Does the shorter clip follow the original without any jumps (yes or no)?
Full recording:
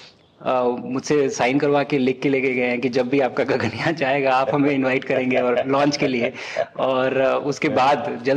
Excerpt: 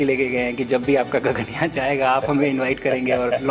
yes